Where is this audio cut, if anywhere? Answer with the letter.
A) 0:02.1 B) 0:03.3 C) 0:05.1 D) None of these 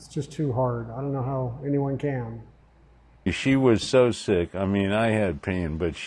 B